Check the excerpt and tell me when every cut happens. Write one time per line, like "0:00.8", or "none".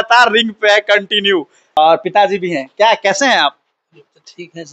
0:01.6